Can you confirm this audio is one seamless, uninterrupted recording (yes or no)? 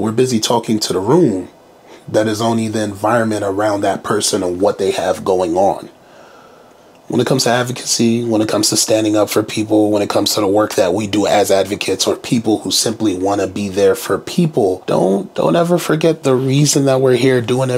no